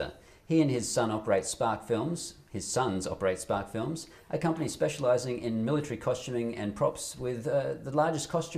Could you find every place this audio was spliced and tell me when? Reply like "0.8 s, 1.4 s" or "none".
7.4 s